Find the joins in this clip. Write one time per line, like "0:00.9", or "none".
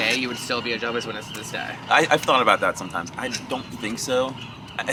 none